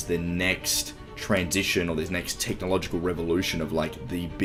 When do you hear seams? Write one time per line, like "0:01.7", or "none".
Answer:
none